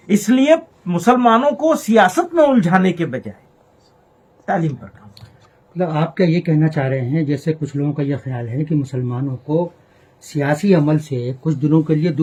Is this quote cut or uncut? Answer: uncut